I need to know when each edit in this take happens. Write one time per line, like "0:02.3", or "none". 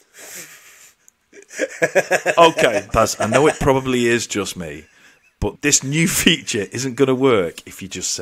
0:02.9
0:05.6